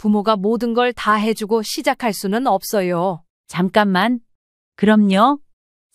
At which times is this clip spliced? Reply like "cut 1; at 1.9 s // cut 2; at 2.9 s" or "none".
cut 1; at 3.3 s